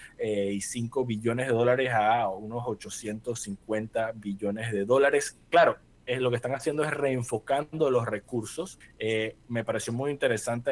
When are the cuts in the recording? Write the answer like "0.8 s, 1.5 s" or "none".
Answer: 8.8 s